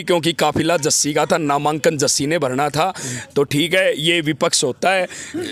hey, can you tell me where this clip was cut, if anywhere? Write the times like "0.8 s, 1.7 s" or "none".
none